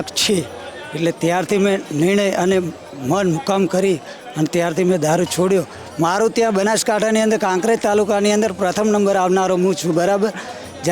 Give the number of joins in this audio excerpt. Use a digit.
1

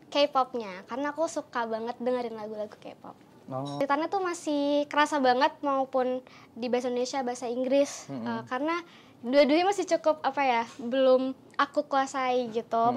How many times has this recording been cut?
1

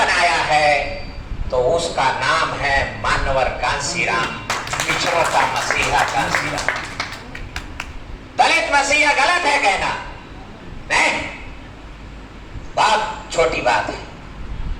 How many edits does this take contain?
0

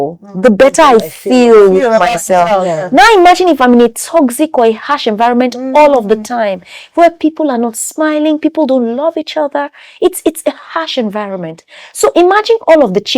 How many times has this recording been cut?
0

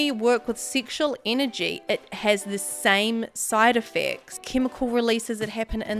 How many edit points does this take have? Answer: 1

